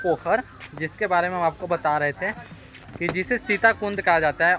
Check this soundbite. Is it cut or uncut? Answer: uncut